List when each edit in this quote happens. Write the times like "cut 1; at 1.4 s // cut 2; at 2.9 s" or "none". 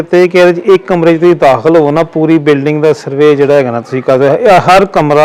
none